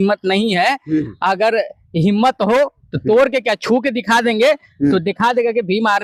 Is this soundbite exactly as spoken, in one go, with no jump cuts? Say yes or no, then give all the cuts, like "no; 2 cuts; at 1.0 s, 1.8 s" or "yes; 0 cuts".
yes; 0 cuts